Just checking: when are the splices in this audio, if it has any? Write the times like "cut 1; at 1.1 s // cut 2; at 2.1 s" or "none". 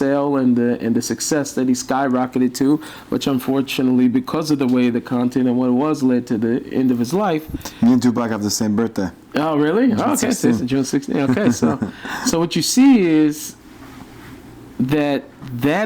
none